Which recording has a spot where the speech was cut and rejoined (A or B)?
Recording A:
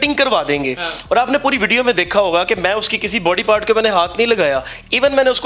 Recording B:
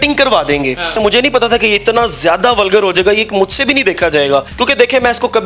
B